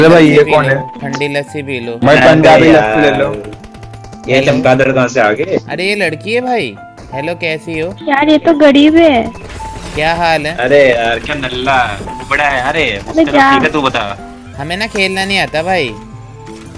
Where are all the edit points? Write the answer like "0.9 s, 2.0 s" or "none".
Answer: 1.9 s

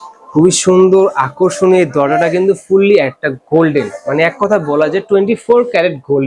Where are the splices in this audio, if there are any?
none

